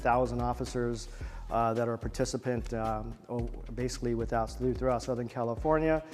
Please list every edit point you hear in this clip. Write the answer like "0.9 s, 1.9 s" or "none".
none